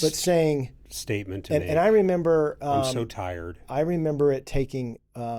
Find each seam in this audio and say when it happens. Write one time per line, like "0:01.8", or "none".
none